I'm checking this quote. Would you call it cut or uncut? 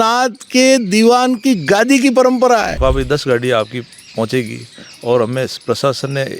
cut